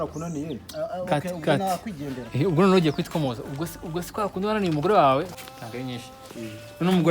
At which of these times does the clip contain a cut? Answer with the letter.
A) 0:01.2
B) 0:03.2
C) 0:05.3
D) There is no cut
C